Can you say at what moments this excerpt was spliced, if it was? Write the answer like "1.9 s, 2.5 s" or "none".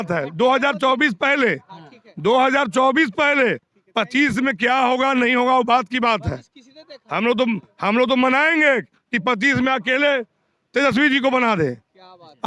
none